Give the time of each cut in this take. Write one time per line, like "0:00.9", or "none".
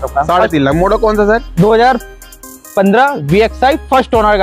none